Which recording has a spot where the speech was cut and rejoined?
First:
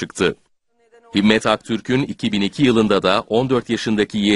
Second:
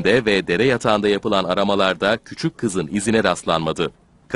first; 1 cut; at 3.2 s

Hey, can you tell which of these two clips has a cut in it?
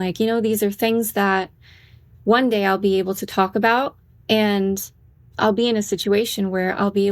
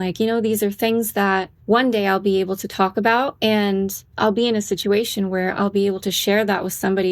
second; 3 cuts; at 1.5 s, 3.3 s, 4.0 s

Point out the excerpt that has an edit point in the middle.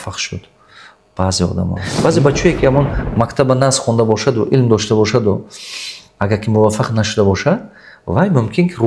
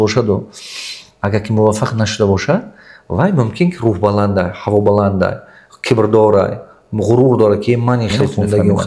first; 1 cut; at 1.8 s

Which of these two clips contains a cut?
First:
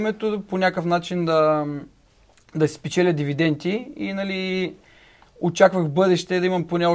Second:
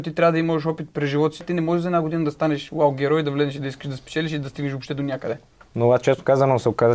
second; 2 cuts; at 1.4 s, 5.5 s

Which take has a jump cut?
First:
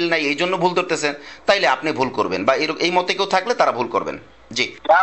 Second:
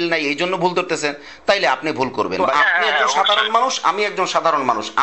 second; 1 cut; at 2.4 s

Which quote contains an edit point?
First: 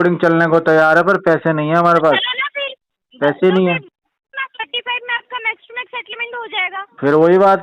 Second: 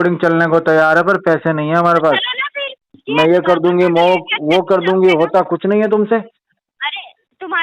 second; 1 cut; at 3.0 s

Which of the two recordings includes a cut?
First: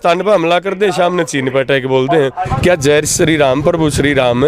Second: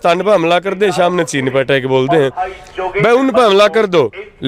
first; 1 cut; at 2.5 s

